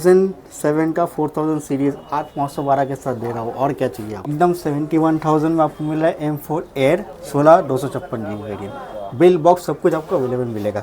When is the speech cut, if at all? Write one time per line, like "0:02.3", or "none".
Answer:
0:04.3